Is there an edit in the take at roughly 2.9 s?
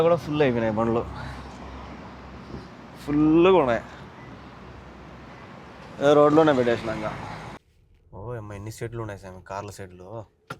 no; 1 cut; at 7.6 s

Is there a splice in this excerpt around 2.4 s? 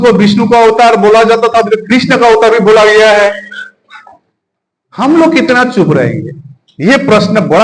no; 0 cuts

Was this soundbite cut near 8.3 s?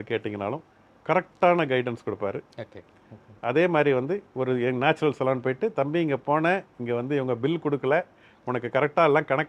no; 0 cuts

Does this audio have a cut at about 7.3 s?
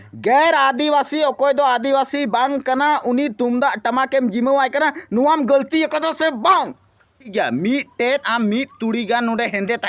yes; 1 cut; at 7.3 s

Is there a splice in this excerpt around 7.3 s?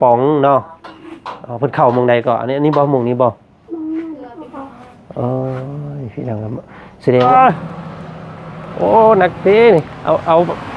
yes; 1 cut; at 7.3 s

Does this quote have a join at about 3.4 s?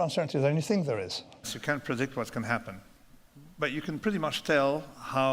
no; 1 cut; at 1.5 s

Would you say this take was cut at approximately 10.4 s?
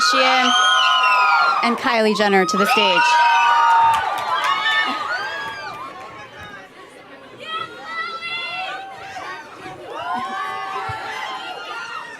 yes; 1 cut; at 10.4 s

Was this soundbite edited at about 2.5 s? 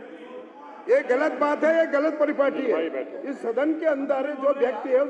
no; 0 cuts

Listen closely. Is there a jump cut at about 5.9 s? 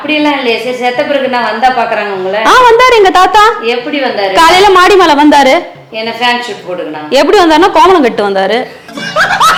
no; 0 cuts

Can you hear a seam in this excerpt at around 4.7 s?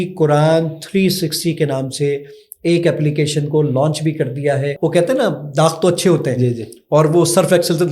yes; 1 cut; at 4.7 s

